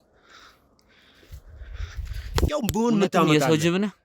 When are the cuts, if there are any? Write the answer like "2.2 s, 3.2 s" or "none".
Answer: 2.4 s